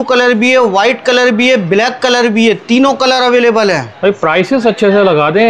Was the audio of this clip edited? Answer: no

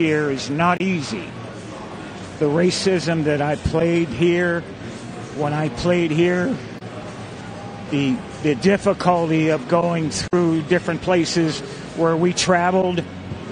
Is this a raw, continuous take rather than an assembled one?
yes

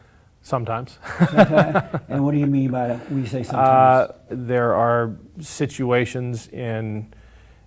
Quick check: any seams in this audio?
no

